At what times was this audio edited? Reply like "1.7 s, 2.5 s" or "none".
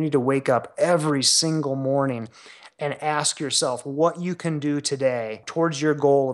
5.4 s